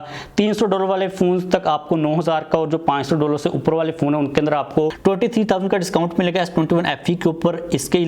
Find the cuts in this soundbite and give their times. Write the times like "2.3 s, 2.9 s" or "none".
5.0 s